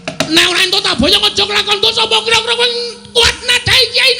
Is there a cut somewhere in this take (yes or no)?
no